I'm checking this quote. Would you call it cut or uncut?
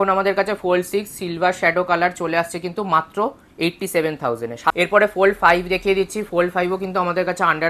cut